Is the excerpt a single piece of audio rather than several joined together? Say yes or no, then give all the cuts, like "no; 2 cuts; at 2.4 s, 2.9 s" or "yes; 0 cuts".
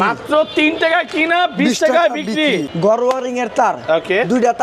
no; 1 cut; at 2.8 s